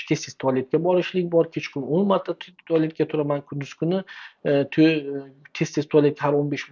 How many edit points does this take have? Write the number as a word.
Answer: zero